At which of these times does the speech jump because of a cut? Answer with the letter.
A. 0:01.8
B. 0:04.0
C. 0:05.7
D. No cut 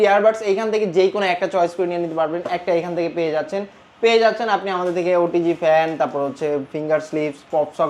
D